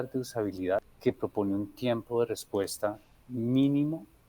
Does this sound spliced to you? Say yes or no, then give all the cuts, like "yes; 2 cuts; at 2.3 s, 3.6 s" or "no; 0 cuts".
yes; 1 cut; at 0.9 s